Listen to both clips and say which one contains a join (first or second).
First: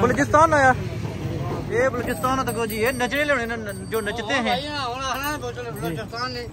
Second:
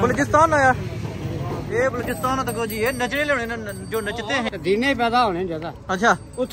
second